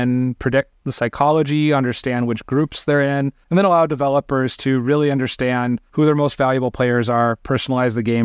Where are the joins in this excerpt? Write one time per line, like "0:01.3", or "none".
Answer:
0:03.4
0:05.8